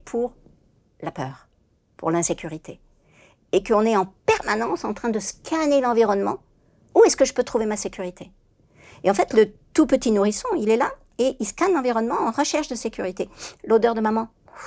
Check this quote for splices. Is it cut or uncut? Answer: uncut